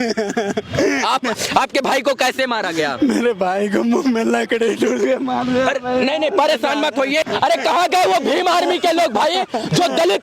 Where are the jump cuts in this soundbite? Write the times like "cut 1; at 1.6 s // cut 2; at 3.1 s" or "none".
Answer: cut 1; at 1.3 s // cut 2; at 7.3 s